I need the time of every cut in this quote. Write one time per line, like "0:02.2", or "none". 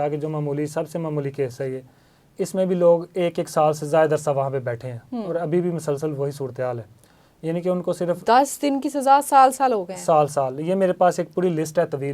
none